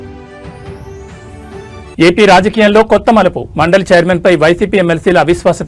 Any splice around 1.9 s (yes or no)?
yes